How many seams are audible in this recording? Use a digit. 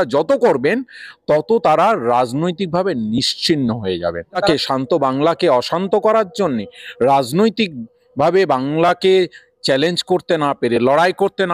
1